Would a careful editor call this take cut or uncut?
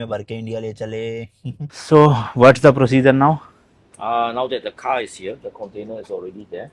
cut